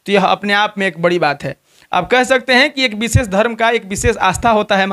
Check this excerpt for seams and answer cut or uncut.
uncut